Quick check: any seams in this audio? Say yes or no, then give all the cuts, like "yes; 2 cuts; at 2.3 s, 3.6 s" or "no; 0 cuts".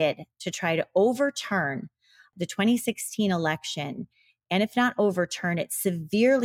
yes; 1 cut; at 2.2 s